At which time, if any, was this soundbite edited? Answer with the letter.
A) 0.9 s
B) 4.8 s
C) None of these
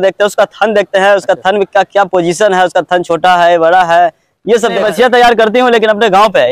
B